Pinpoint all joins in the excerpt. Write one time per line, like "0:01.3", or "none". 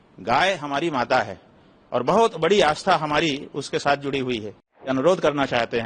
0:04.9